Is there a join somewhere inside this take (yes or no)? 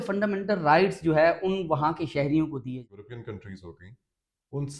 yes